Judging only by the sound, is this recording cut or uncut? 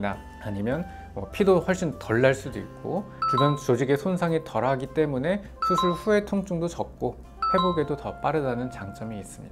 uncut